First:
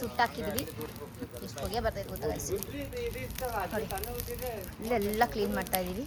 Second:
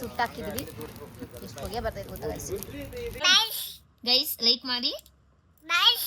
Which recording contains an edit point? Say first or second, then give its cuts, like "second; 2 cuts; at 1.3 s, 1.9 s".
second; 1 cut; at 3.2 s